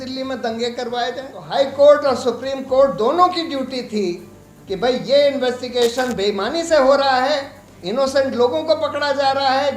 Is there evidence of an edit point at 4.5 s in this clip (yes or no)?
no